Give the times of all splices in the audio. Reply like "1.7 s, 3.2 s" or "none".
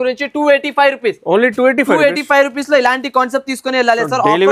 none